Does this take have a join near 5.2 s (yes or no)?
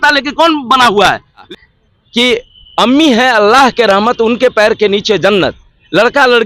no